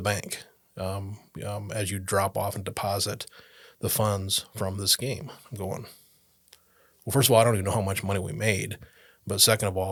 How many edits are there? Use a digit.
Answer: 0